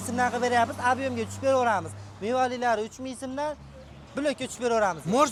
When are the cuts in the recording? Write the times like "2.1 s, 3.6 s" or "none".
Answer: none